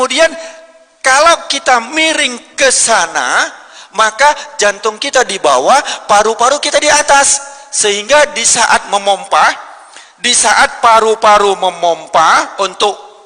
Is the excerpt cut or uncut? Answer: uncut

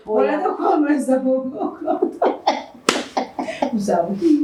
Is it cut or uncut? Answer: uncut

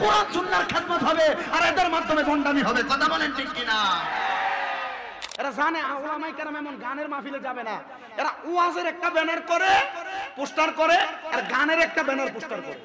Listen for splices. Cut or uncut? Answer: cut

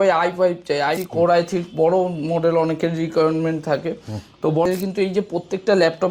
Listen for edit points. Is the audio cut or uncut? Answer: cut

